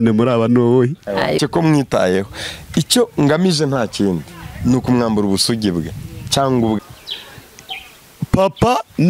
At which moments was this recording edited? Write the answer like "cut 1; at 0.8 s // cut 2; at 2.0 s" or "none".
cut 1; at 1.4 s // cut 2; at 6.8 s